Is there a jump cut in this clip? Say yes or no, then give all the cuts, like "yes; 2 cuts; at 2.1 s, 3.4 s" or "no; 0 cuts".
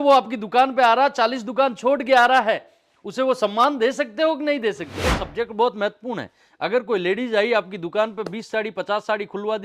yes; 1 cut; at 5.2 s